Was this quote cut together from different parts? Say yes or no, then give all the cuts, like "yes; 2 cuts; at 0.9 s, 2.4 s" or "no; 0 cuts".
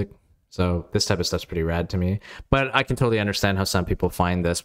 no; 0 cuts